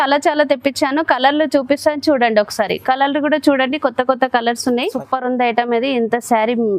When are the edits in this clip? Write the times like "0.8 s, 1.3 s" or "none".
4.9 s